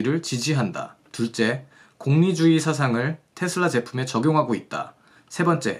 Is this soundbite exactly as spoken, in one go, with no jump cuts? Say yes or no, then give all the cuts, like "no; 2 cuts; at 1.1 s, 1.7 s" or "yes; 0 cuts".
yes; 0 cuts